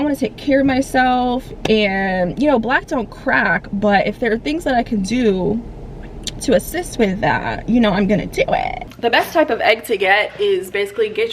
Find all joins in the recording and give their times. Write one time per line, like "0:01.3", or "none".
0:08.8